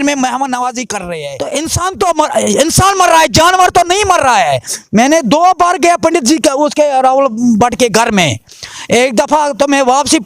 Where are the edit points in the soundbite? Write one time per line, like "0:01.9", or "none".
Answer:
0:01.0

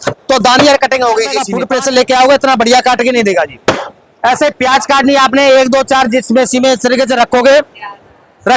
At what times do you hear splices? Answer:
none

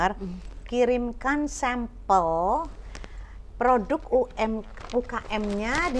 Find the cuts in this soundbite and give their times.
none

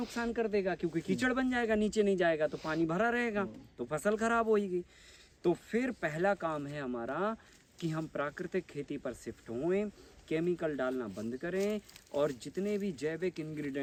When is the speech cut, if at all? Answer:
none

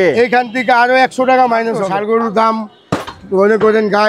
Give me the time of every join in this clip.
0:01.9

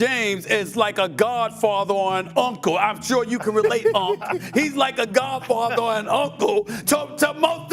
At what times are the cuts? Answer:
none

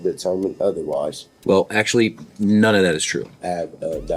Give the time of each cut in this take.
0:01.3
0:03.3

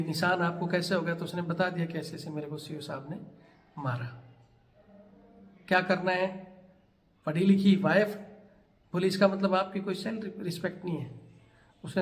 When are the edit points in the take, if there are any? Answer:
none

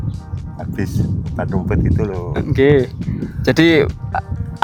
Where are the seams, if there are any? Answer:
none

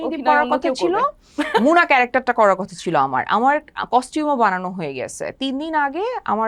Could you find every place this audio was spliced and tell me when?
none

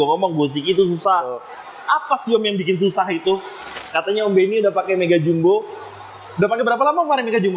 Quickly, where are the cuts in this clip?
0:03.5

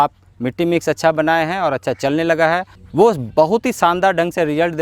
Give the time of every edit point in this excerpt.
0:02.8

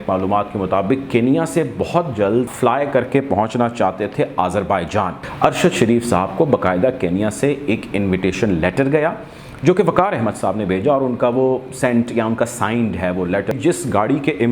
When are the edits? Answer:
0:02.5
0:05.2
0:13.5

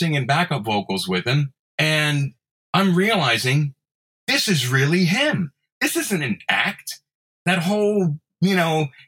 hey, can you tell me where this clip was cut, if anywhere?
0:01.6

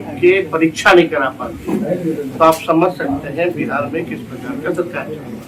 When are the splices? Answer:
none

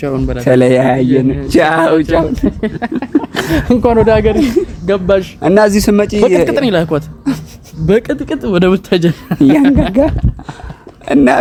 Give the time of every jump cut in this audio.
none

